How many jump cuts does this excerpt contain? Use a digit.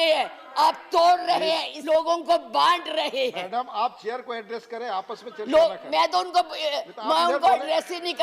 1